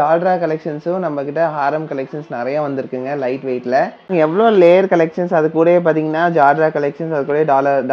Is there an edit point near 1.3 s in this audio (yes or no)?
no